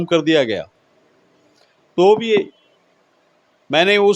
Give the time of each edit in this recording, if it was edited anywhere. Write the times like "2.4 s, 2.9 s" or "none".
none